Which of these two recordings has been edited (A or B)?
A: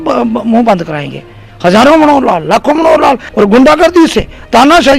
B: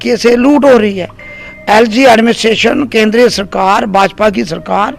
A